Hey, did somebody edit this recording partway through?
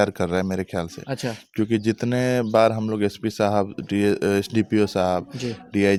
no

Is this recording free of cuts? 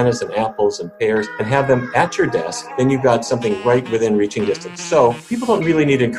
no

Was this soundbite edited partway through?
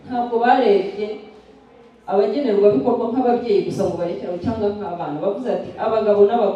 no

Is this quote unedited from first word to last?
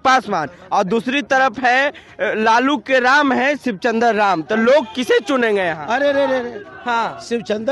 yes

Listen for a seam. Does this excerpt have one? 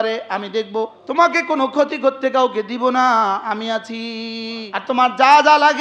yes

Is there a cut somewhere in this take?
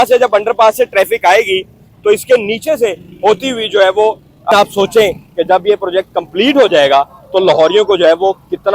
yes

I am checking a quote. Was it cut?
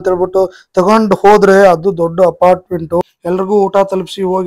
yes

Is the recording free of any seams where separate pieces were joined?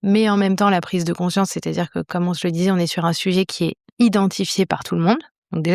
yes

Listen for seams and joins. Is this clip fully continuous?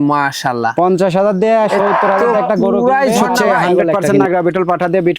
no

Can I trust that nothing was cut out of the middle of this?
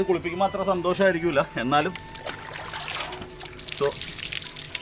yes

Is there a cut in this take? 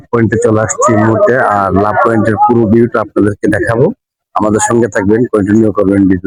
no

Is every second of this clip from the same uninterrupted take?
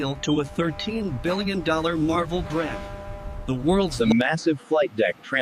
no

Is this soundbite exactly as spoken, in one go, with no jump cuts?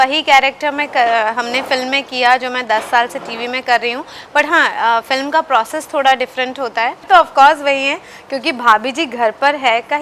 no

